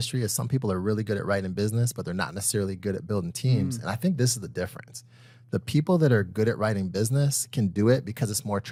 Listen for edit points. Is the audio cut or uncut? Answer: uncut